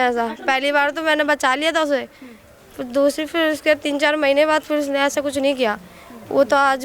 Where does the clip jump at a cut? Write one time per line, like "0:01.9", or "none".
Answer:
none